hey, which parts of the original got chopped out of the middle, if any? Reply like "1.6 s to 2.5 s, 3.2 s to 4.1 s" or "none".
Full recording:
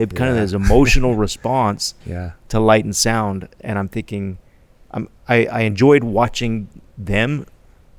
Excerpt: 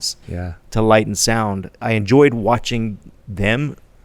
3.6 s to 5.5 s